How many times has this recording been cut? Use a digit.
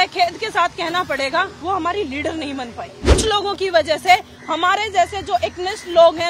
1